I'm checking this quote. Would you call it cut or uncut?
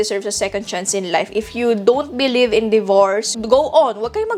uncut